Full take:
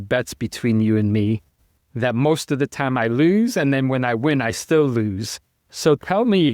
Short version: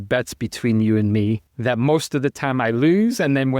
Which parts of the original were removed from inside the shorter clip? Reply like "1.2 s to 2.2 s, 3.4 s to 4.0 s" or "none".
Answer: 1.5 s to 1.9 s